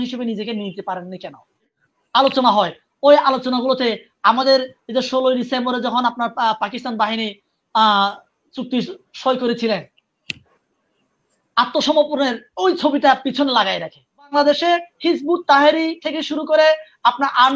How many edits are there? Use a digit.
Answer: 2